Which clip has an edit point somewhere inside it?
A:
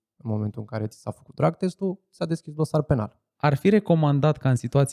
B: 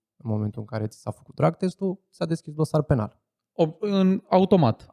A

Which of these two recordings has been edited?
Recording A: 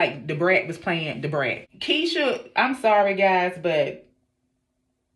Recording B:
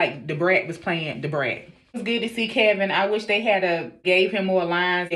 A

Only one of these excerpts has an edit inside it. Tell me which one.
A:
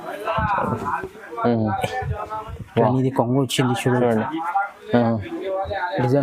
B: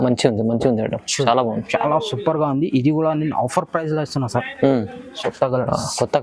B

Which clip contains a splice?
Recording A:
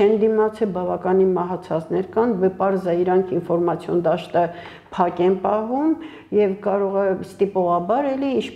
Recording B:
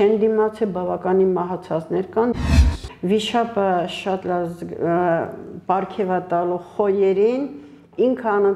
B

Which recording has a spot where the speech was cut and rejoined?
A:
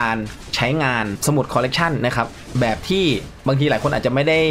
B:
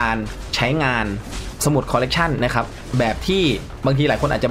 A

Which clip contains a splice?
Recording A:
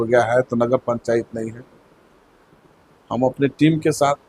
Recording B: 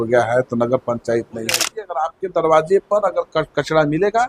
B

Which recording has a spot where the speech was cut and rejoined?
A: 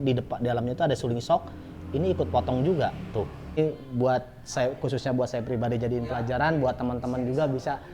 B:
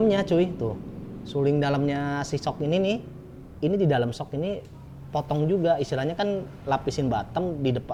A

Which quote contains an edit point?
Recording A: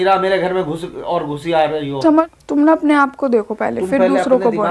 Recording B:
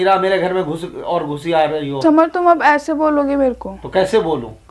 A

